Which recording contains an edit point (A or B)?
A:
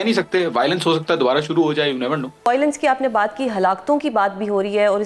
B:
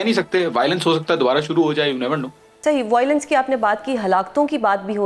A